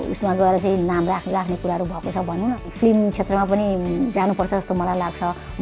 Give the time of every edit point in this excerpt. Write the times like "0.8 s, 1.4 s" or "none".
2.7 s